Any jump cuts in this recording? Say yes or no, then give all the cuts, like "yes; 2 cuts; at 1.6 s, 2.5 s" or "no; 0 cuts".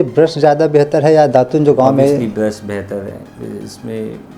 yes; 1 cut; at 2.2 s